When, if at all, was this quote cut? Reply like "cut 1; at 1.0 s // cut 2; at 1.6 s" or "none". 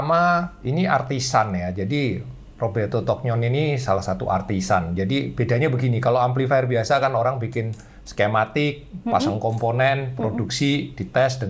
none